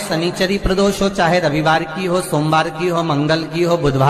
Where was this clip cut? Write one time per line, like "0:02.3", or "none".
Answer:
none